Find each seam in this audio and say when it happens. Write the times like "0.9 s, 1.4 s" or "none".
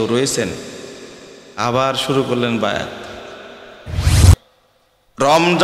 4.1 s